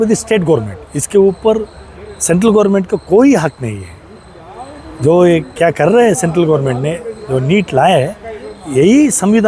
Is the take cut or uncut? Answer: uncut